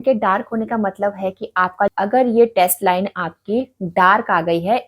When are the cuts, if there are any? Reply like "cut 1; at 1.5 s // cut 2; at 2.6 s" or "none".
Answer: cut 1; at 1.9 s